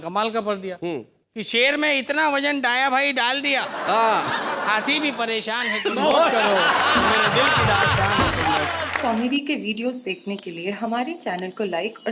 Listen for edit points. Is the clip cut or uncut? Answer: cut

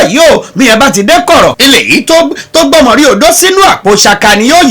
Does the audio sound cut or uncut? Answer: cut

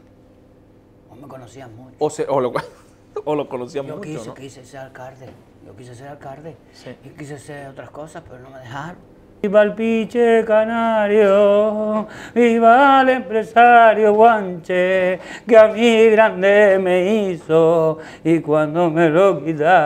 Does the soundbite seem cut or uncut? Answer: cut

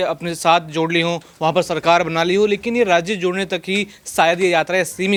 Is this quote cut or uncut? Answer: uncut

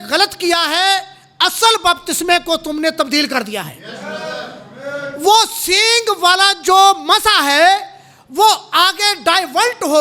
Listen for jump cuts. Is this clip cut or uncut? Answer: uncut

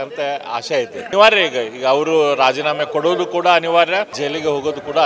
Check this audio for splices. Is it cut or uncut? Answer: cut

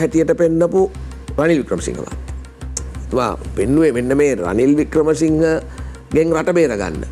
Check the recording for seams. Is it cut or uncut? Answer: uncut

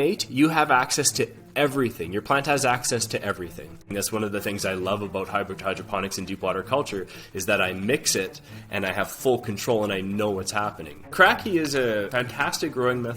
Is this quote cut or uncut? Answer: cut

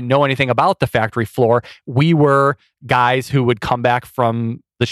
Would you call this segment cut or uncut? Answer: uncut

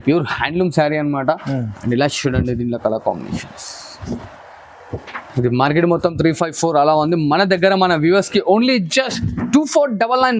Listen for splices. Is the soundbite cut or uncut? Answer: uncut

